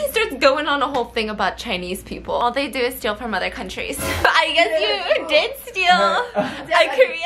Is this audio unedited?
no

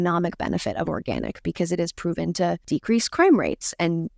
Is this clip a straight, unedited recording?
no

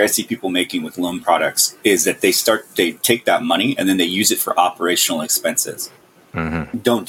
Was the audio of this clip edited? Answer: no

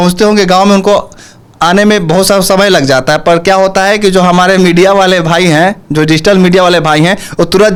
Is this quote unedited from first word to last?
yes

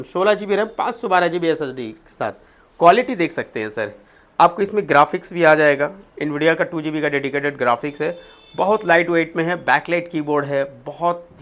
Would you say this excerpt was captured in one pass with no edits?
yes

